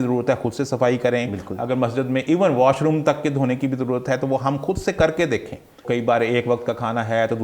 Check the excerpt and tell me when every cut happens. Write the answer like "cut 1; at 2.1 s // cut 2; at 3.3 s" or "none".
cut 1; at 5.8 s